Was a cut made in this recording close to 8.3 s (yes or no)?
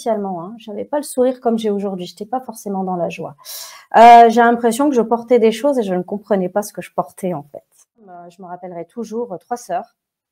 yes